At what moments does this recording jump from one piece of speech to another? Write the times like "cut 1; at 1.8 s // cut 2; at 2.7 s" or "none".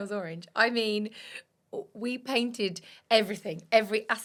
none